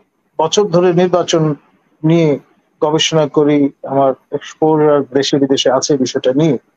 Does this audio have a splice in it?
no; 0 cuts

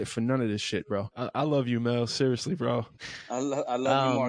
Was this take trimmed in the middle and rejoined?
yes; 1 cut; at 1.2 s

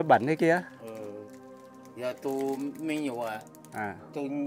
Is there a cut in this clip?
no; 0 cuts

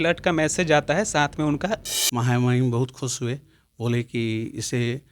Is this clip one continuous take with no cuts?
no; 1 cut; at 2.0 s

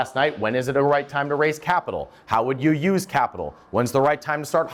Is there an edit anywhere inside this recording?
no; 0 cuts

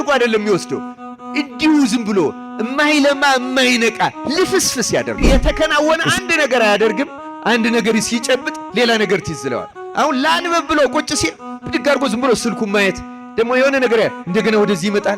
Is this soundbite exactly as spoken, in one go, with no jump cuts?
no; 1 cut; at 5.2 s

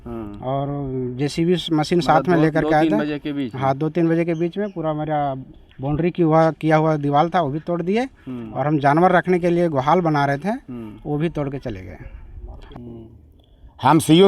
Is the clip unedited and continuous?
no; 1 cut; at 12.6 s

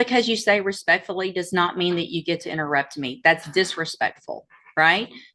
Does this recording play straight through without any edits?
yes; 0 cuts

